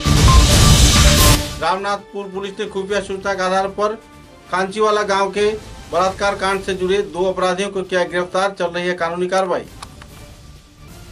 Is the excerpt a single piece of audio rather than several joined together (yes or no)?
yes